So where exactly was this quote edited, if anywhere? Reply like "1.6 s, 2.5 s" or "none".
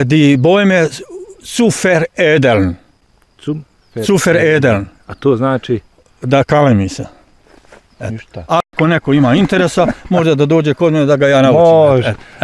none